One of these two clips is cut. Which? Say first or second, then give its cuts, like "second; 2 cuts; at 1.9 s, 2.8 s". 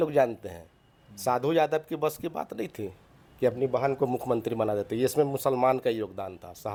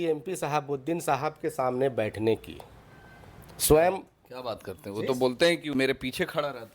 second; 1 cut; at 5.7 s